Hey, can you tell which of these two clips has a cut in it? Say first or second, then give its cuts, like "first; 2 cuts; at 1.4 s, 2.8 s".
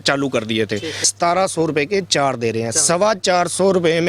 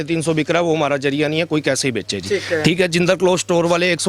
first; 1 cut; at 1.1 s